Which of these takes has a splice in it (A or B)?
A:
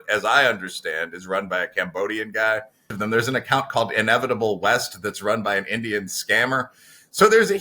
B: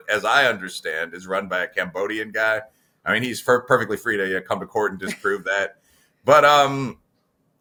A